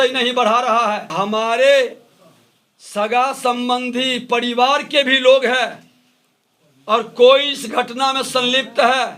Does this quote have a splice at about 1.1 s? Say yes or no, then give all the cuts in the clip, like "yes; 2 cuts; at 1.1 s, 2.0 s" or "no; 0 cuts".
yes; 1 cut; at 1.1 s